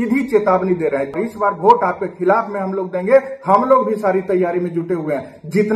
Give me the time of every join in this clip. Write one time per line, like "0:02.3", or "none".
0:01.1